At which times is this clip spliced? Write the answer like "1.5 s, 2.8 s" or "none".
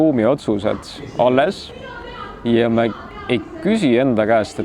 none